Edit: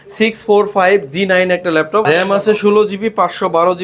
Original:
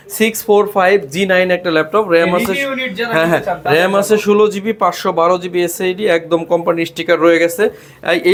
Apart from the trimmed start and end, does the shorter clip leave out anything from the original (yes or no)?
yes